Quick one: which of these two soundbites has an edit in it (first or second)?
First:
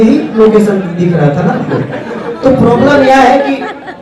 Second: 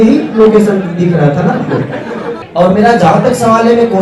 second